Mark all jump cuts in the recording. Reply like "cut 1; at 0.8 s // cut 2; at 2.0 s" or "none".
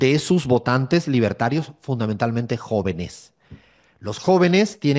none